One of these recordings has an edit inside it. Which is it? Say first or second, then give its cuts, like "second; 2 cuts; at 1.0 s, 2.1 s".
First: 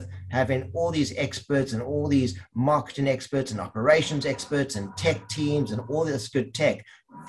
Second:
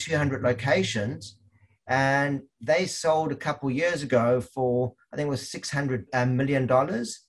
second; 1 cut; at 6.1 s